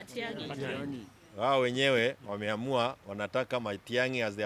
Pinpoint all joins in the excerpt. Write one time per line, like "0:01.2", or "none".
none